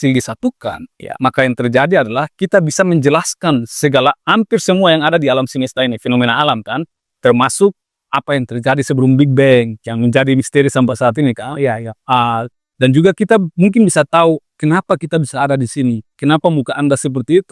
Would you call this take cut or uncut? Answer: uncut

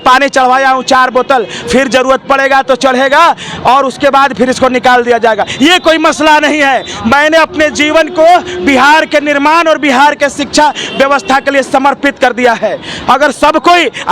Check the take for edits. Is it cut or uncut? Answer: uncut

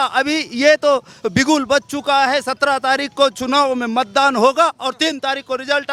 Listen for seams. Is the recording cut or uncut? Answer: uncut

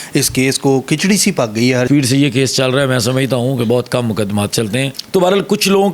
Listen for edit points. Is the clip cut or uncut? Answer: cut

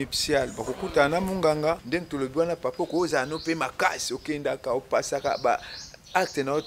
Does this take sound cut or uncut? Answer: cut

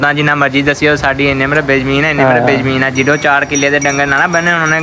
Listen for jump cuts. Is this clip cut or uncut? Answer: uncut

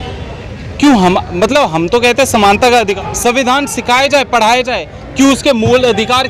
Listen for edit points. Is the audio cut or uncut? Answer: cut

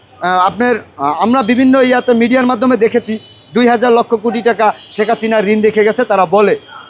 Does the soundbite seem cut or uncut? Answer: uncut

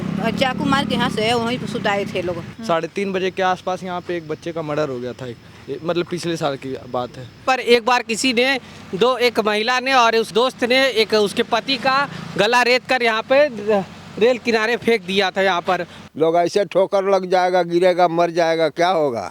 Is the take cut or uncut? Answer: cut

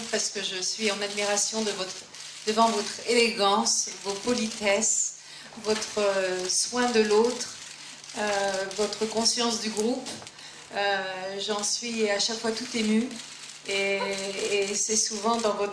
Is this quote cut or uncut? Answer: cut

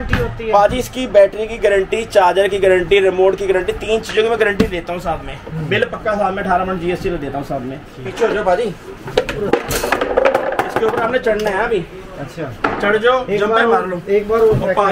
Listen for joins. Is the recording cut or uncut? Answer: uncut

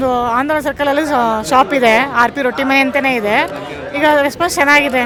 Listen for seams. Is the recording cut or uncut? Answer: uncut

